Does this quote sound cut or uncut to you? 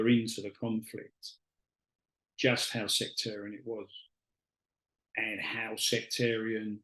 uncut